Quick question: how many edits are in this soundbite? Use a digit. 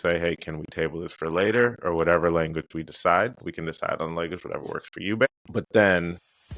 1